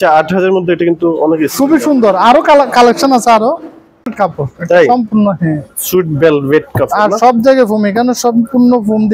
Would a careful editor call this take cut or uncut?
cut